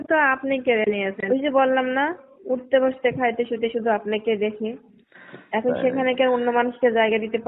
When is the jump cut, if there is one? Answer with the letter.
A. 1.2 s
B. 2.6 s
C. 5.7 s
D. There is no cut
A